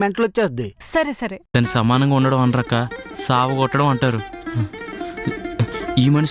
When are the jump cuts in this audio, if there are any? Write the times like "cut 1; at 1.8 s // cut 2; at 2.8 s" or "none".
cut 1; at 1.3 s